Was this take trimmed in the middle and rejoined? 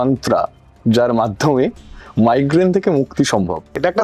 no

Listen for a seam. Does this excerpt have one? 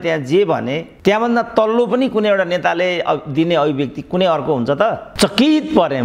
yes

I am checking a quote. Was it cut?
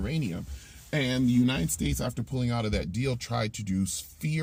no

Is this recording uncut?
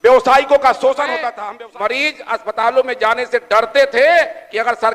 no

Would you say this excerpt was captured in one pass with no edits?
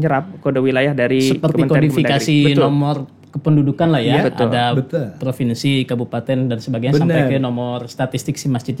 yes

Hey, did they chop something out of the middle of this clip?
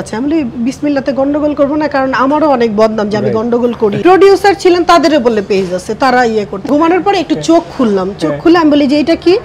yes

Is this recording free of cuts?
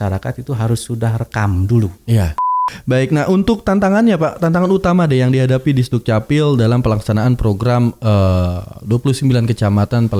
no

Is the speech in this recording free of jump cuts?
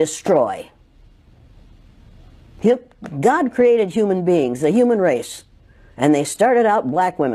yes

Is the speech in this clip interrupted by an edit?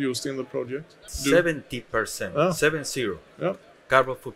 yes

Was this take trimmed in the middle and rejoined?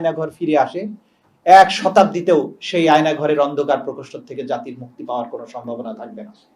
no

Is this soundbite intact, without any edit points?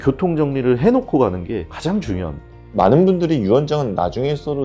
yes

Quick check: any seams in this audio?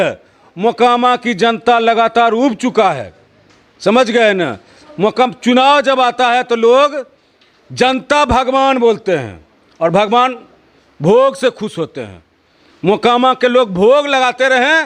no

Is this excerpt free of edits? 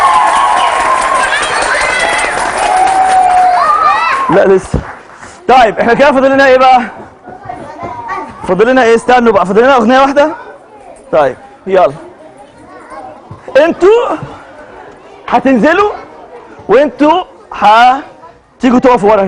yes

